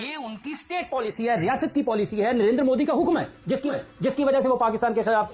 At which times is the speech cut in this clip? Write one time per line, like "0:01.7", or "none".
none